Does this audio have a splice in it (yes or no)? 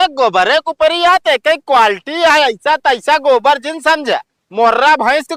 no